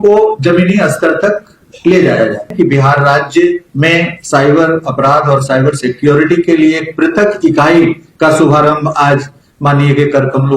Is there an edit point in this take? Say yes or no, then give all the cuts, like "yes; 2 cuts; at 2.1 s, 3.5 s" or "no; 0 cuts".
yes; 1 cut; at 2.5 s